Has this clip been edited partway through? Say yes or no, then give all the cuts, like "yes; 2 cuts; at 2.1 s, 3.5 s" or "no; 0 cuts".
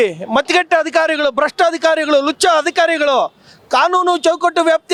no; 0 cuts